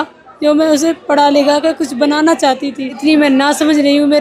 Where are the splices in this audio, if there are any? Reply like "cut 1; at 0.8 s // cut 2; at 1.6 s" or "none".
cut 1; at 2.9 s